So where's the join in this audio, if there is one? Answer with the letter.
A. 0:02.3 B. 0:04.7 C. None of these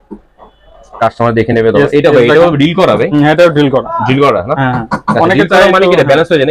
C